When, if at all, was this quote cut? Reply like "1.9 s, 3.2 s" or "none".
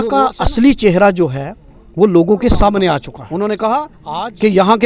3.2 s

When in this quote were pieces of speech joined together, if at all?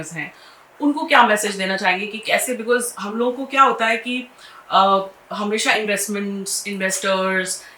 none

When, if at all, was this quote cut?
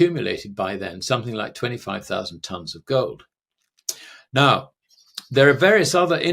none

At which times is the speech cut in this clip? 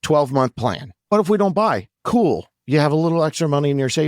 0.9 s

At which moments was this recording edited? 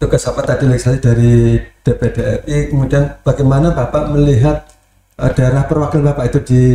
none

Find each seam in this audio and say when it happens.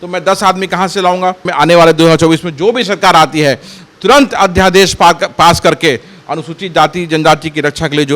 1.5 s

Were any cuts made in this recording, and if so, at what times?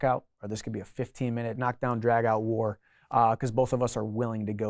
1.6 s

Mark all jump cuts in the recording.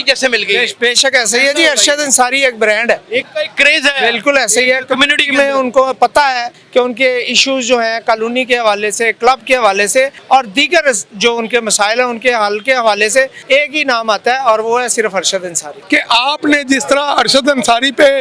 3.3 s, 6.6 s, 10.2 s, 13.4 s, 15.7 s

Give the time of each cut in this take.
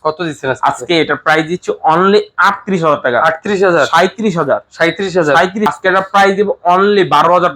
5.7 s

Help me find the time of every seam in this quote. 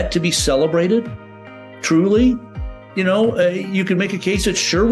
none

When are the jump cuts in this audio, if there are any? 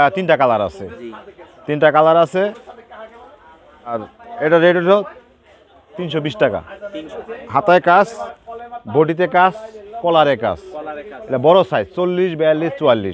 4.2 s, 7.0 s

